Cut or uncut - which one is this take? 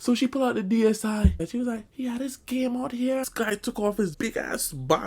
cut